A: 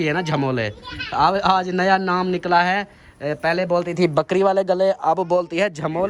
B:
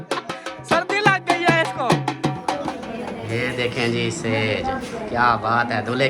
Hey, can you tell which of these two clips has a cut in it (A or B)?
B